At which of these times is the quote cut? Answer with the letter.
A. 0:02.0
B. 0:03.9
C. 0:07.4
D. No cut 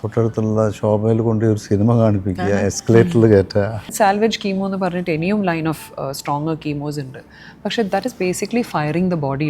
B